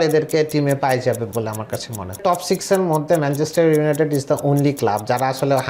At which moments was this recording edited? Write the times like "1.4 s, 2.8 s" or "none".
2.2 s